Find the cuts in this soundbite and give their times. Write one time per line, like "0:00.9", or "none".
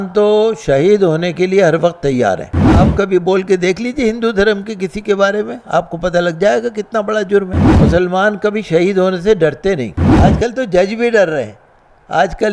0:02.7
0:07.6
0:10.0